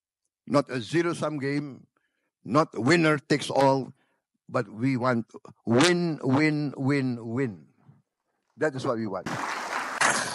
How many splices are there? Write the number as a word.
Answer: one